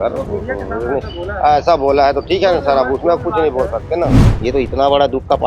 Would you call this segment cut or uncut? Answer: cut